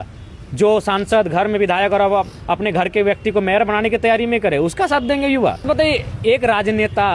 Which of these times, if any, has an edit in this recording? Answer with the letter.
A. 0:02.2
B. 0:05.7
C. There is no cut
B